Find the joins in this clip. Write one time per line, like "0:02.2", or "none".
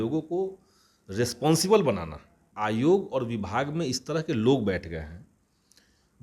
0:02.4